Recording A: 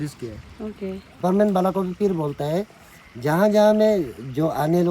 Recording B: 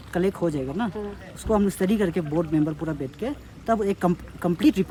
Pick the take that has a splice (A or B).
A